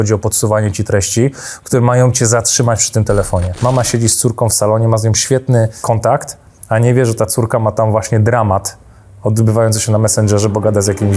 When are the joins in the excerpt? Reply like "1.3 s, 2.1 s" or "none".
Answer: 3.5 s, 5.8 s